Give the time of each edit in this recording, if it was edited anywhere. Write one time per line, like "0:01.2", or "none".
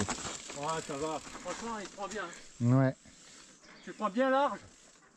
none